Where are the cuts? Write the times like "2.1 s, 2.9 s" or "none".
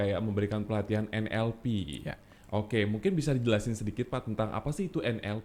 none